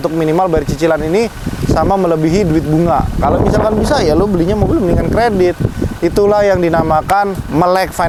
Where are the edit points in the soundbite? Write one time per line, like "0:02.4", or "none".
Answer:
none